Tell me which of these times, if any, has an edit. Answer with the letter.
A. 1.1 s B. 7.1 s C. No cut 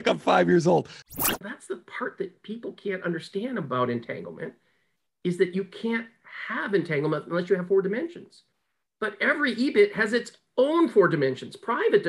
A